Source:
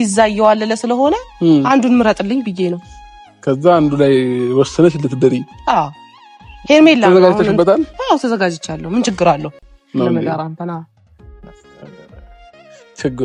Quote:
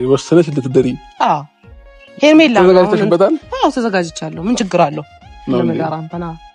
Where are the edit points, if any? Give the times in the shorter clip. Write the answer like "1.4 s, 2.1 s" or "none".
none